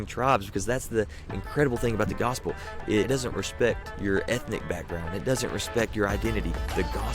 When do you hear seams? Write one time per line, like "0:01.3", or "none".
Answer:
0:03.1
0:03.9